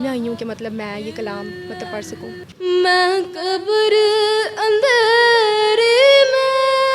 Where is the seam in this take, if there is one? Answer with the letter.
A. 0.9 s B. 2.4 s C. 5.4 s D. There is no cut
B